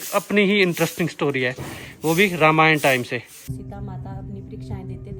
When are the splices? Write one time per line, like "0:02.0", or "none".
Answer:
0:03.3

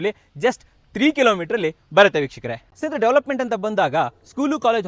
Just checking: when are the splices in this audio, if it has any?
0:02.7

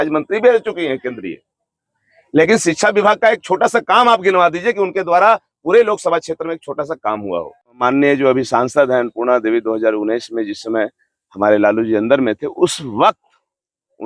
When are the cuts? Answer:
0:07.7

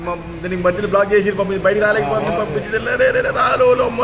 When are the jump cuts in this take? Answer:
none

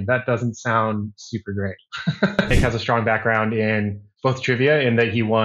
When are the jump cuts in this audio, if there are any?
0:02.4

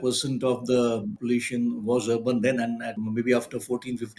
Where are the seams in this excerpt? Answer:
0:01.1
0:02.9

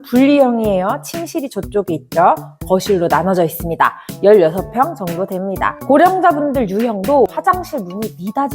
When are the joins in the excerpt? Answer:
0:05.8
0:07.4

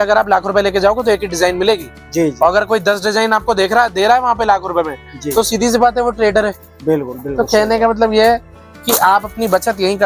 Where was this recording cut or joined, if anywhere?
none

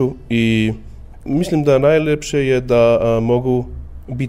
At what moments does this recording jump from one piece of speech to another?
0:01.2

